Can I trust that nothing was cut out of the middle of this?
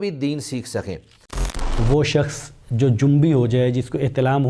no; 1 cut; at 1.3 s

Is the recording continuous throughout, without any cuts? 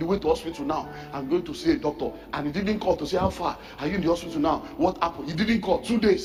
yes; 0 cuts

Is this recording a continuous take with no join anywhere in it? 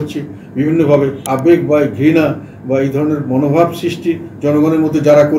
no; 1 cut; at 1.2 s

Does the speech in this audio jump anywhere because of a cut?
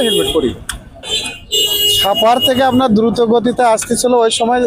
yes; 1 cut; at 1.0 s

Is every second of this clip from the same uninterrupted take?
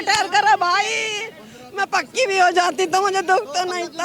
yes; 0 cuts

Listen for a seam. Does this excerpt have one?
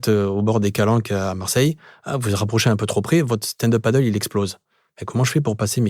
no; 0 cuts

